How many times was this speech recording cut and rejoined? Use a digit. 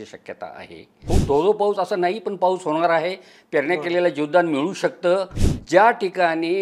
2